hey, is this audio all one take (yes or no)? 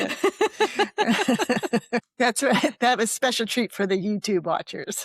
no